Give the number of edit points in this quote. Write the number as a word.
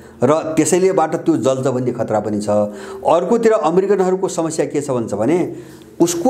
zero